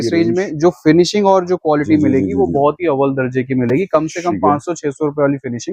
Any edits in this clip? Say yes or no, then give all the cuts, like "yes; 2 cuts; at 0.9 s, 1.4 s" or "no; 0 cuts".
no; 0 cuts